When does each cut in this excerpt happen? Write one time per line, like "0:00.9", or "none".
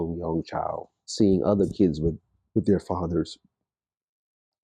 0:01.0